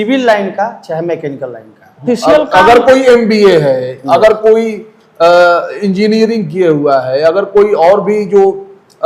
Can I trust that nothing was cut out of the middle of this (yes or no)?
no